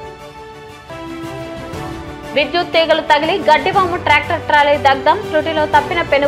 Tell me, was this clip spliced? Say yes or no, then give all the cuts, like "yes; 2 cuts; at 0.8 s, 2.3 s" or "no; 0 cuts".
yes; 1 cut; at 1.3 s